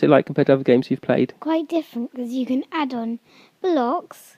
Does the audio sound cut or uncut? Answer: cut